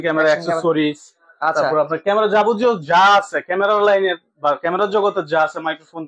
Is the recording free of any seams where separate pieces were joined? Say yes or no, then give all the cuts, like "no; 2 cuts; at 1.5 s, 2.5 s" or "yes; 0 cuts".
yes; 0 cuts